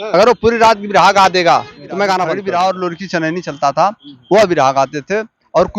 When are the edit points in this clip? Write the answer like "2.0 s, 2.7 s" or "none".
2.3 s